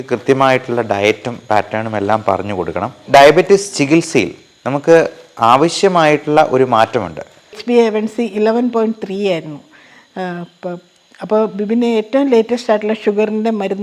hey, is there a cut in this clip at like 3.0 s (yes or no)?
yes